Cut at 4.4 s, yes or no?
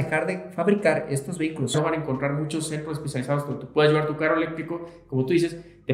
no